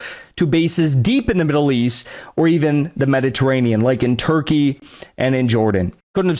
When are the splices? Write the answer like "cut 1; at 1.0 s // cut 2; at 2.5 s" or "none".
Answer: none